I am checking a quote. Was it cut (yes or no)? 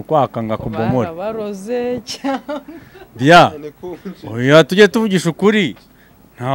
no